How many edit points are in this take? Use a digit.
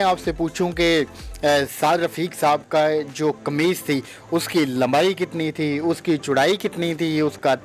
0